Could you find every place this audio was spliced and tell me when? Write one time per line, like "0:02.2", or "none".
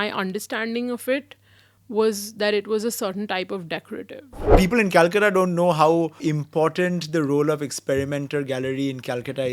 0:04.5
0:06.3